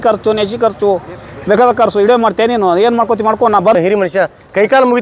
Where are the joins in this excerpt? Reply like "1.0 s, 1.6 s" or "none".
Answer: 3.7 s

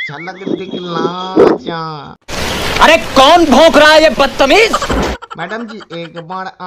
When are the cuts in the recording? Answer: none

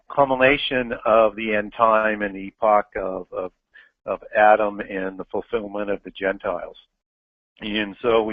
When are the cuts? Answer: none

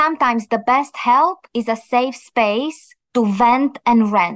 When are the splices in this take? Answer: none

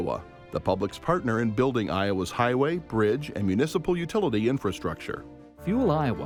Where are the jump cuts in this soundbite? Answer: none

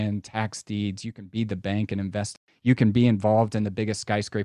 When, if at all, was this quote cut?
2.5 s

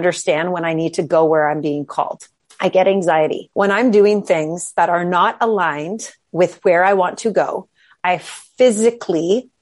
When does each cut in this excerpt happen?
3.4 s

